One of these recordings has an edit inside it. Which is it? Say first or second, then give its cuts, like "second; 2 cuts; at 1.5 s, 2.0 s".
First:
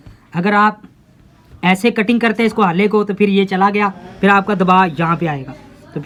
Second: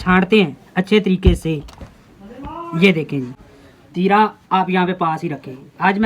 second; 1 cut; at 3.4 s